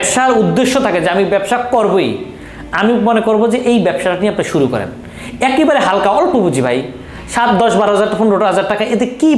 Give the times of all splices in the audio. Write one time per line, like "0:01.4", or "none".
none